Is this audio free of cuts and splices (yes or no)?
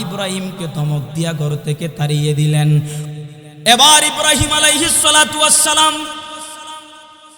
no